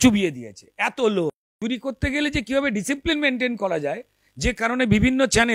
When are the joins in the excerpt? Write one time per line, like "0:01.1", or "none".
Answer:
0:01.5

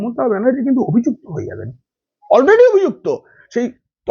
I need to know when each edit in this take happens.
none

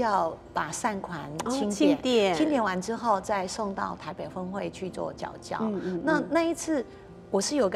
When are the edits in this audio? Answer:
none

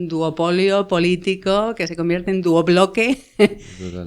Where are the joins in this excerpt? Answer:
none

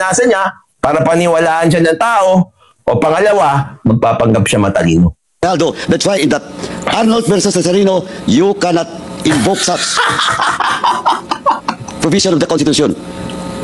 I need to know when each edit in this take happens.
0:05.3

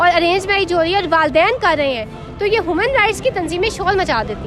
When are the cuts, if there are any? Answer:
none

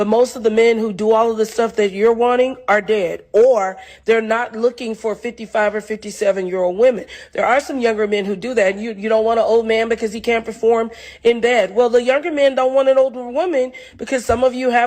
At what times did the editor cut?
0:03.5

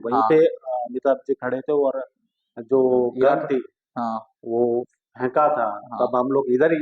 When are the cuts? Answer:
none

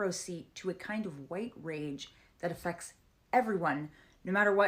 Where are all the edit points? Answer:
0:01.9

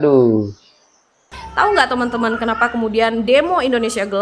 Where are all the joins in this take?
0:01.3

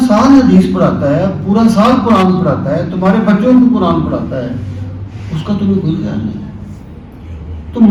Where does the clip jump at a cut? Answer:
none

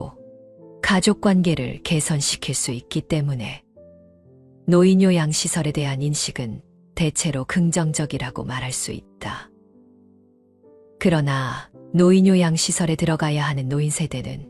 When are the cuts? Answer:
0:09.5
0:11.0

